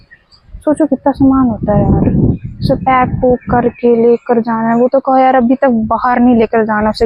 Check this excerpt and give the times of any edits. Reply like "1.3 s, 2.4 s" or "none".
none